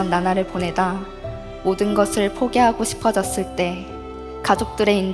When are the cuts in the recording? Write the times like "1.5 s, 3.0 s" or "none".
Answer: none